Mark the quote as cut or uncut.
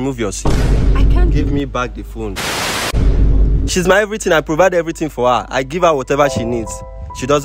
cut